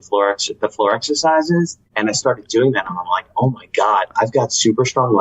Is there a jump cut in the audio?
yes; 1 cut; at 1.8 s

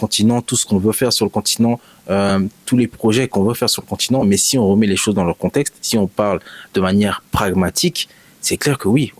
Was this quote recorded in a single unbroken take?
yes; 0 cuts

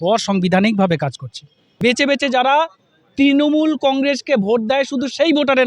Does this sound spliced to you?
yes; 1 cut; at 1.8 s

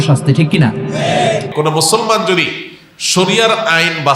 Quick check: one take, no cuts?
no; 1 cut; at 1.5 s

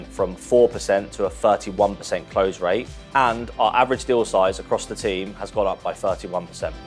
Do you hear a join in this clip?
no; 0 cuts

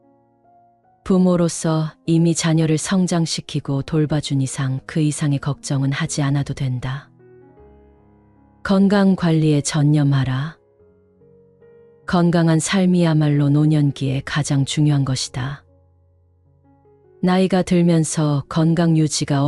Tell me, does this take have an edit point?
no; 0 cuts

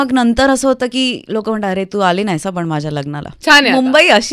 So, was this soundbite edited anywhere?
yes; 1 cut; at 3.3 s

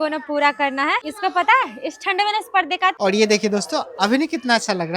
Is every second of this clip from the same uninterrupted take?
no; 2 cuts; at 1.0 s, 3.0 s

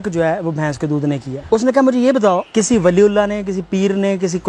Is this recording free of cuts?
no; 2 cuts; at 1.3 s, 2.5 s

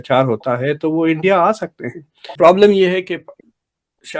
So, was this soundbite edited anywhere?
yes; 1 cut; at 2.2 s

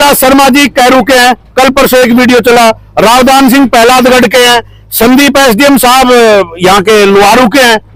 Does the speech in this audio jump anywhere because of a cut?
no; 0 cuts

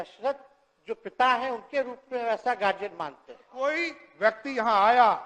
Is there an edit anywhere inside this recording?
yes; 1 cut; at 3.5 s

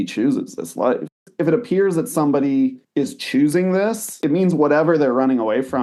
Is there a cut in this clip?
yes; 3 cuts; at 1.2 s, 2.8 s, 4.1 s

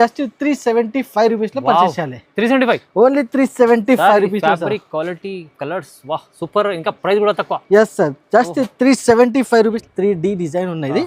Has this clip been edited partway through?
yes; 1 cut; at 9.8 s

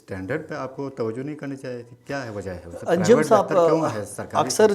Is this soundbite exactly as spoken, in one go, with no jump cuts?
yes; 0 cuts

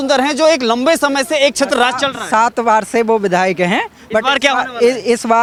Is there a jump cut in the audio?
no; 0 cuts

